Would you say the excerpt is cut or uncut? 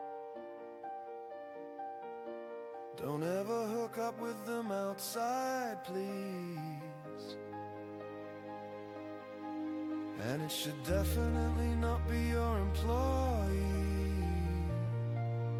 uncut